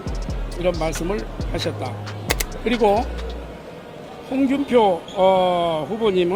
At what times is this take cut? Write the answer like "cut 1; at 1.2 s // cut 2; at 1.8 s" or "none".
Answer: cut 1; at 2.3 s